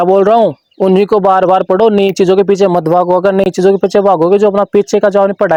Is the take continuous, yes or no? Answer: yes